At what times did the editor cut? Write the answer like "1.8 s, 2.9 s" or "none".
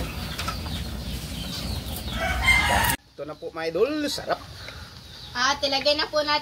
2.9 s